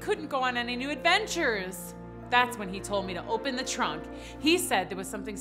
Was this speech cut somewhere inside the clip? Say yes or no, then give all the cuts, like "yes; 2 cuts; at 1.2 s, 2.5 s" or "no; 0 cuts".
no; 0 cuts